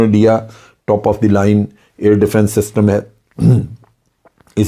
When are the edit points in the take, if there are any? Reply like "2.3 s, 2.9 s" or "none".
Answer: none